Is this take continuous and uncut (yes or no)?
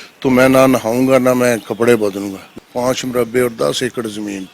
no